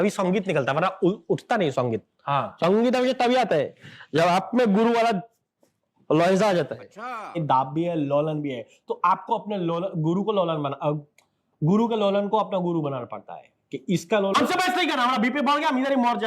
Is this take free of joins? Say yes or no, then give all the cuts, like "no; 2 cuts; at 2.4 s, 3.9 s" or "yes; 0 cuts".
no; 2 cuts; at 7.4 s, 14.3 s